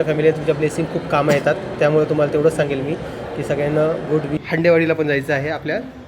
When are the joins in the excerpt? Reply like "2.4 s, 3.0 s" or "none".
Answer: 4.4 s

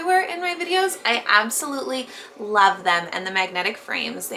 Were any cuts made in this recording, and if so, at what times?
none

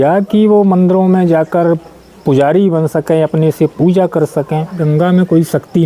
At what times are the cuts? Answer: 4.8 s

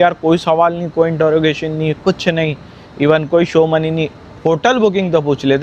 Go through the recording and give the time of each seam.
none

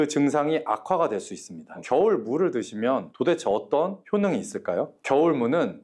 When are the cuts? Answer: 1.8 s

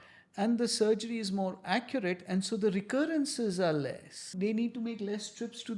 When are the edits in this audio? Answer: 4.3 s

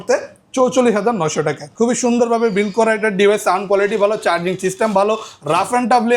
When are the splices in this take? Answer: 1.6 s

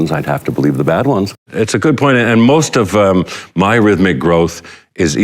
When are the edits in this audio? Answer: 1.4 s

